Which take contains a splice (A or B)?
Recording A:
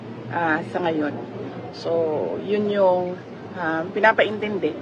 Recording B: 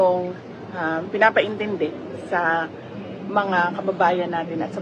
A